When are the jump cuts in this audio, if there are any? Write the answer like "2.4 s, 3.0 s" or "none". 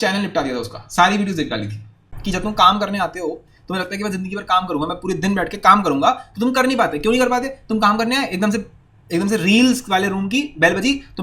2.1 s